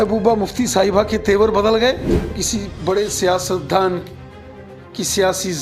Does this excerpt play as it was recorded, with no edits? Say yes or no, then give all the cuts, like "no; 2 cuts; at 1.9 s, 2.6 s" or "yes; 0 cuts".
no; 1 cut; at 2.4 s